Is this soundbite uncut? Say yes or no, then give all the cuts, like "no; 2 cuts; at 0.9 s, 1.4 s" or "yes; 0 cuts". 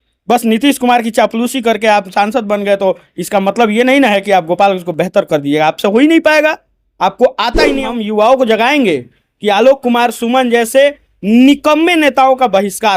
no; 1 cut; at 7.8 s